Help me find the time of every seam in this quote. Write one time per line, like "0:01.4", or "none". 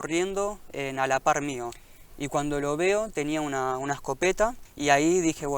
0:01.7
0:04.7